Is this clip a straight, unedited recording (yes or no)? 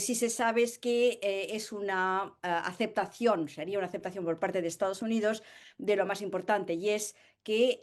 yes